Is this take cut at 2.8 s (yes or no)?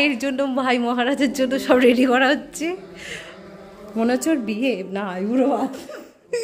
no